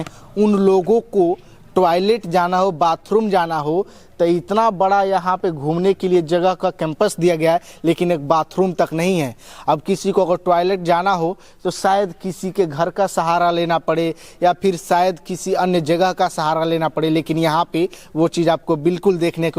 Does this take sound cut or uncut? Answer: uncut